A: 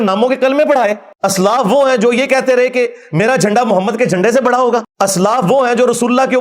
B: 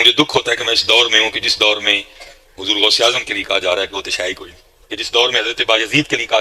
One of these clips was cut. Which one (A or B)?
A